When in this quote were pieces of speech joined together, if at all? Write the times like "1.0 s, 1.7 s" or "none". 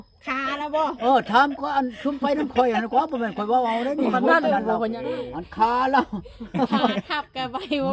5.0 s